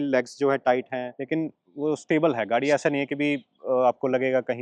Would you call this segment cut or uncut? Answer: cut